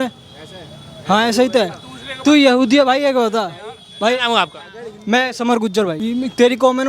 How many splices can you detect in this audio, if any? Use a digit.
1